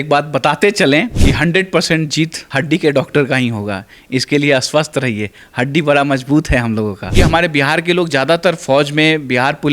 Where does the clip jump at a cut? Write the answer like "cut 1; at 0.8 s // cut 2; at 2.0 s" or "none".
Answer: cut 1; at 1.1 s // cut 2; at 2.4 s // cut 3; at 7.1 s